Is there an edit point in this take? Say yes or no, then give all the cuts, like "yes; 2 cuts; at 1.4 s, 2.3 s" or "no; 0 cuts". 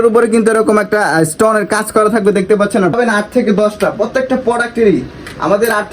yes; 1 cut; at 2.9 s